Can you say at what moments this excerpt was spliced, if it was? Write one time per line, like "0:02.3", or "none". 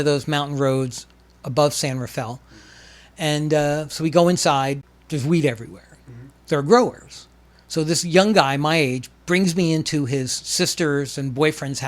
0:04.9